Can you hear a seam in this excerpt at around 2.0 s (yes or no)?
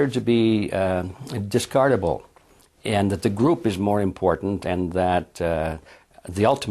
no